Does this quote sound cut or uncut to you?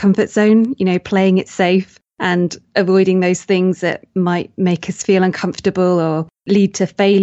uncut